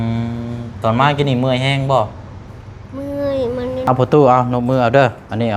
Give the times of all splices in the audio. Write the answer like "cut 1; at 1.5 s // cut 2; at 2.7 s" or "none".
cut 1; at 3.9 s